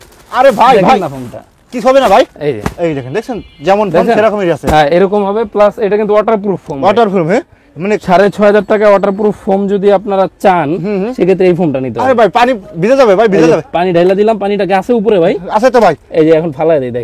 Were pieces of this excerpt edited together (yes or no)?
no